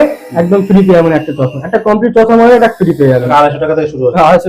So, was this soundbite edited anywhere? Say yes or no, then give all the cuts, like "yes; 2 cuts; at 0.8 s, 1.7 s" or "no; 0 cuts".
yes; 1 cut; at 3.3 s